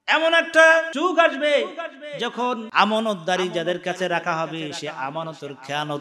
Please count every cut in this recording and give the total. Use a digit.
2